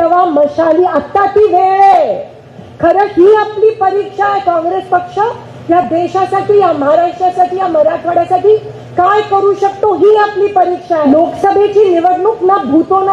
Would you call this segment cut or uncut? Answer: cut